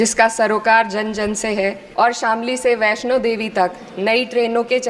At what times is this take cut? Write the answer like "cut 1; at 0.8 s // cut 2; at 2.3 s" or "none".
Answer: cut 1; at 1.8 s